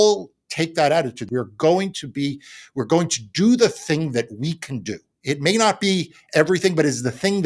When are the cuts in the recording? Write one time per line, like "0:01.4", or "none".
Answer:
0:01.2